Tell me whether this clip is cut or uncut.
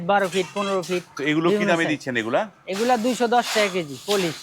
uncut